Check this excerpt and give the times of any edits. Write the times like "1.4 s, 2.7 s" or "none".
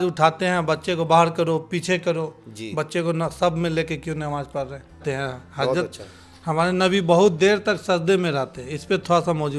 5.0 s

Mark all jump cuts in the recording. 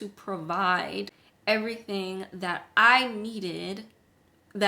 none

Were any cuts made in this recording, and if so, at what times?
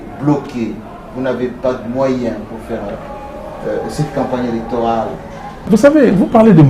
5.7 s

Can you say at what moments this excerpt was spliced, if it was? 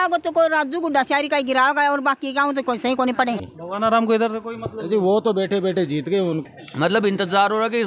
3.5 s, 6.4 s

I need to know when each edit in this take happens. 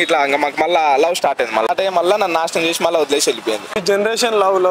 1.7 s, 3.8 s

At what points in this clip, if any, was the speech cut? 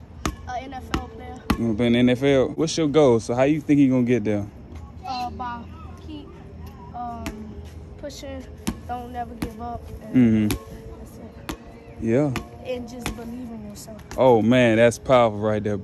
2.6 s

